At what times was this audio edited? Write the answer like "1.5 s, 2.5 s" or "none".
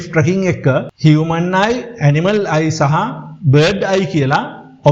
none